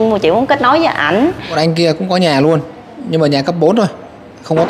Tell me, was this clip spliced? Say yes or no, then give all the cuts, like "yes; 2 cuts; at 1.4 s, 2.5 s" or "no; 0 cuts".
yes; 1 cut; at 1.5 s